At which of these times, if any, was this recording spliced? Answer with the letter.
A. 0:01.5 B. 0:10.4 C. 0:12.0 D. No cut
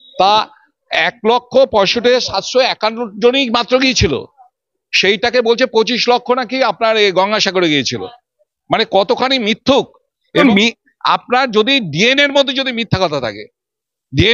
B